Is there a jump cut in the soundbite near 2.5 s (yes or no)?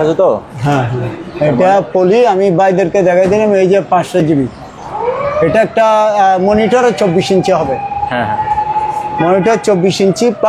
no